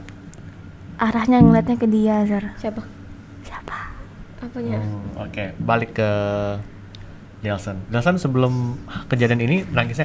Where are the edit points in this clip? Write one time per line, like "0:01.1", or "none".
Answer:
none